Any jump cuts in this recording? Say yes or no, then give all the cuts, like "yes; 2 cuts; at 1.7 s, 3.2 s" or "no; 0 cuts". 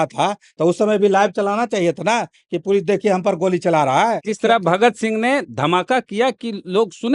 yes; 1 cut; at 4.3 s